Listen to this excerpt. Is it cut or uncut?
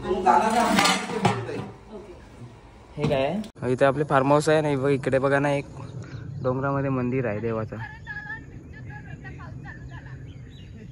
cut